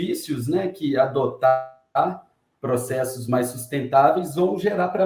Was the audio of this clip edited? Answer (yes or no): no